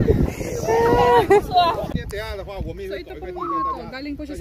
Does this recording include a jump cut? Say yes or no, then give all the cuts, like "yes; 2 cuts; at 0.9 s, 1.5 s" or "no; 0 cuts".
yes; 1 cut; at 1.9 s